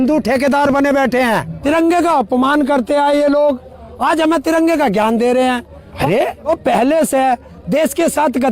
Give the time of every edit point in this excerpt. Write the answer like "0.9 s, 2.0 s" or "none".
1.5 s, 6.1 s